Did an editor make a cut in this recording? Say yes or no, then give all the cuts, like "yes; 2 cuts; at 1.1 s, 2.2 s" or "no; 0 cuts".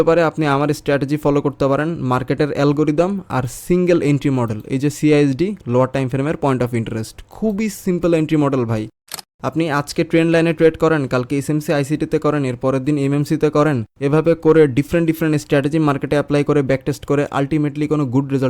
yes; 2 cuts; at 9.2 s, 13.9 s